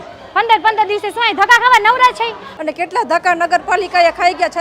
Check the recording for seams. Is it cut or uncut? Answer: cut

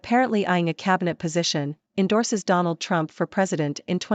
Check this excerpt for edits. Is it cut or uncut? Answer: uncut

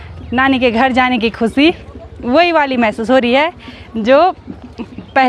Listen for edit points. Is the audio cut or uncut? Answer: uncut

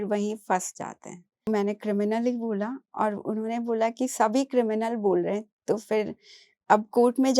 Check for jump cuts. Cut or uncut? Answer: cut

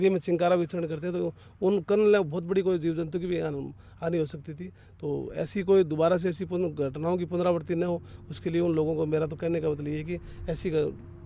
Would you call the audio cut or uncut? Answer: uncut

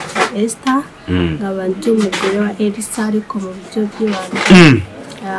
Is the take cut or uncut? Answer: uncut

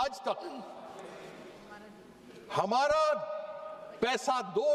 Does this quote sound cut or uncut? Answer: uncut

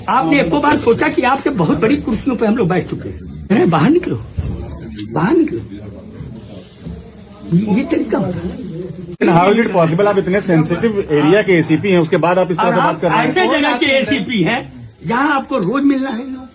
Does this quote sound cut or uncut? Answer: cut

